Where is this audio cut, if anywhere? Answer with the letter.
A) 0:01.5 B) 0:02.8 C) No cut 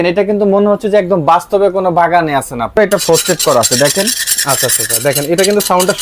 B